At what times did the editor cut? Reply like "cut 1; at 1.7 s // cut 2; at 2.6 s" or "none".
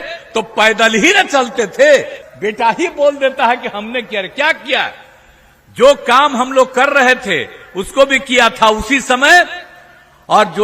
cut 1; at 2.2 s